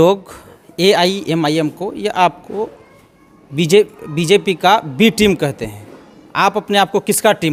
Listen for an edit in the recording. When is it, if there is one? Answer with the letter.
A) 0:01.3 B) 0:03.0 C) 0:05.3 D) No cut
D